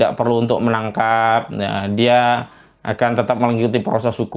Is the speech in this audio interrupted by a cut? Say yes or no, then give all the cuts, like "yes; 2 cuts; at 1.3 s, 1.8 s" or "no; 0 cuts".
no; 0 cuts